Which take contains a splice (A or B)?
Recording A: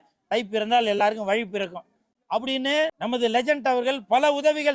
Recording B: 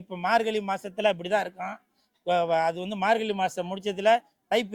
A